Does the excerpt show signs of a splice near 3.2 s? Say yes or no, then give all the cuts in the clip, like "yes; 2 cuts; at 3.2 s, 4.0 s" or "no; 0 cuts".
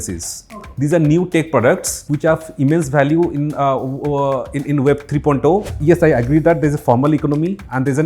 no; 2 cuts; at 2.0 s, 5.8 s